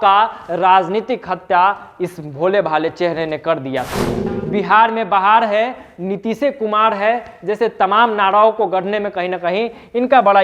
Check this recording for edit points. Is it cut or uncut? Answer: cut